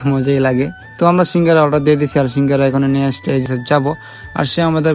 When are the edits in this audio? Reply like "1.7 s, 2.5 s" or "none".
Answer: 3.5 s